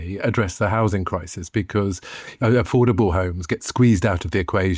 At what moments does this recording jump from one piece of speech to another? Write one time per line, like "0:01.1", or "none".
none